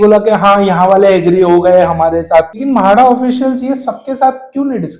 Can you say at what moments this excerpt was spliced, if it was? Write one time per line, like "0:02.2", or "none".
0:02.5